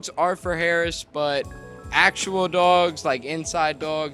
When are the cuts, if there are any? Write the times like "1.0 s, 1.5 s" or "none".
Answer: none